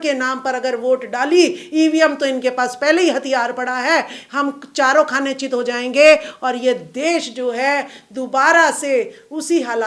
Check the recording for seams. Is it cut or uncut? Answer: uncut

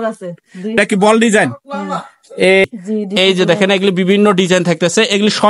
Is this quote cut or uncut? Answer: cut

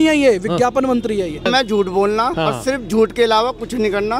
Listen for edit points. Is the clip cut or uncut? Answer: cut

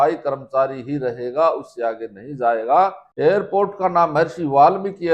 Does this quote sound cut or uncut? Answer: cut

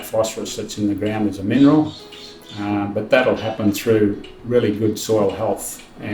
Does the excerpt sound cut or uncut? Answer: uncut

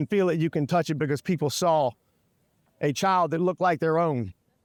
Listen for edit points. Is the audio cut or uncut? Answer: uncut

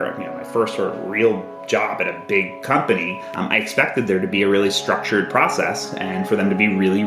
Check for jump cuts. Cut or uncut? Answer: uncut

